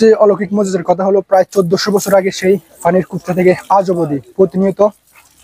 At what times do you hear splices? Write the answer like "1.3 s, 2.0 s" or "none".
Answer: none